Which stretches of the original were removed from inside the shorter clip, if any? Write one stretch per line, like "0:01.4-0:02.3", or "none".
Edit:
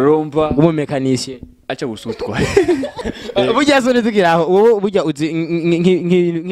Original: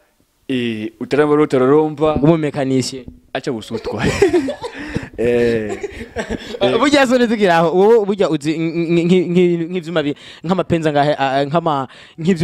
0:04.7-0:06.3

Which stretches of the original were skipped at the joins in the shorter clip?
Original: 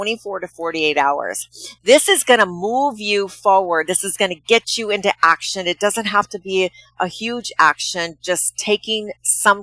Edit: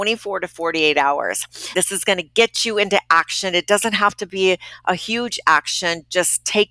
0:01.7-0:03.9

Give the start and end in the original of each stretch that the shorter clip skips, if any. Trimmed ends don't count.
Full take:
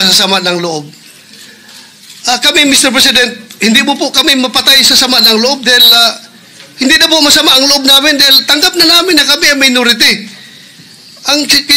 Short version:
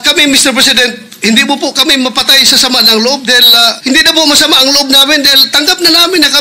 0:06.2-0:06.7

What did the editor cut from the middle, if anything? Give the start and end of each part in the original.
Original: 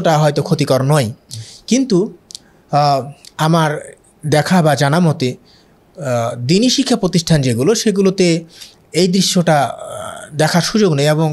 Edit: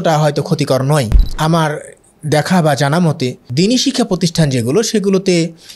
0:01.2-0:03.2
0:05.4-0:06.4

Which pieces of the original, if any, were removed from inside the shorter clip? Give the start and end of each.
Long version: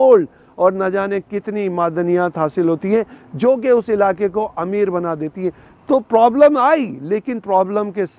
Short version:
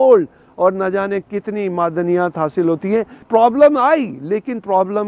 0:03.2-0:06.1

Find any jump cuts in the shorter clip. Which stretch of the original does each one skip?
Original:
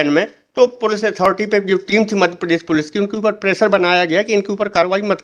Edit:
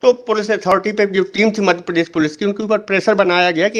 none

